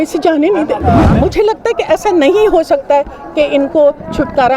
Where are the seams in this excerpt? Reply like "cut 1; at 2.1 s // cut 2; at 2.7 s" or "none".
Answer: cut 1; at 1.1 s